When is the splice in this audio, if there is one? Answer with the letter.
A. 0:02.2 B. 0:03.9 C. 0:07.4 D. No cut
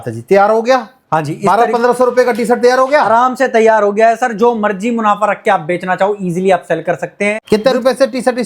C